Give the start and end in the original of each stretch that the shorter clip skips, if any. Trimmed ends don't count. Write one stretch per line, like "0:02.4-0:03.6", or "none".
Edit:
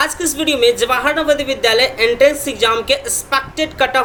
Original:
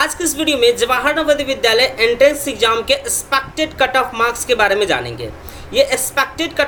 none